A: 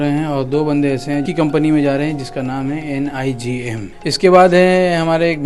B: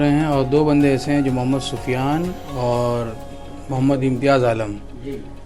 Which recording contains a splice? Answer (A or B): A